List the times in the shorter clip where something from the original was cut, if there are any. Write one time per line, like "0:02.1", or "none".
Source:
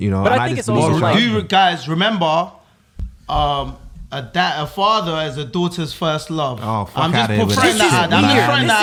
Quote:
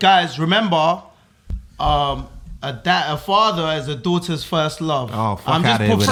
none